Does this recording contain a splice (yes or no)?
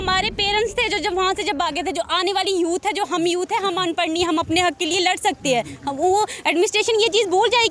no